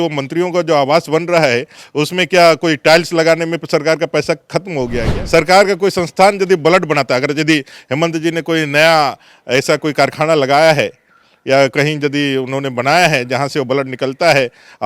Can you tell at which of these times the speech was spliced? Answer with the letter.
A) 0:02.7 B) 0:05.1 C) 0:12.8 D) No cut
B